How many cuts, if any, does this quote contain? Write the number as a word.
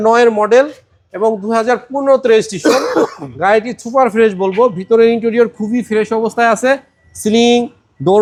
zero